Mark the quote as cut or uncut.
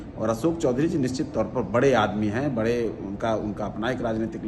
uncut